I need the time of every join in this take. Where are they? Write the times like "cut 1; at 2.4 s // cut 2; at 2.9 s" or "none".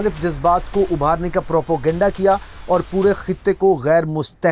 none

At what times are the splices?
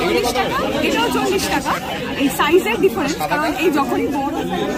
none

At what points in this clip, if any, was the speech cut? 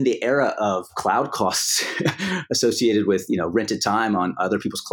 cut 1; at 0.9 s

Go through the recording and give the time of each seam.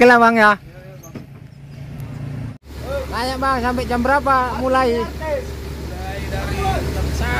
cut 1; at 2.6 s

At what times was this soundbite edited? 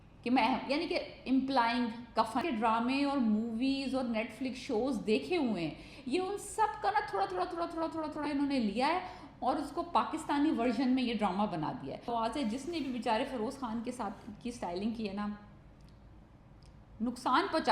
cut 1; at 2.4 s // cut 2; at 12.1 s

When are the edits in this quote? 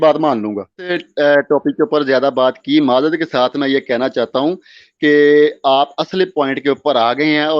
cut 1; at 1.0 s

